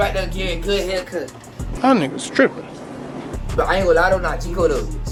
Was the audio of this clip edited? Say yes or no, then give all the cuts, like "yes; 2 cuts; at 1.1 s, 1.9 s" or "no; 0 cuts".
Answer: no; 0 cuts